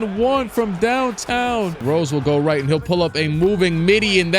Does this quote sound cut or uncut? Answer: cut